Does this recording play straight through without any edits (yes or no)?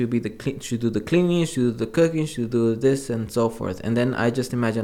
yes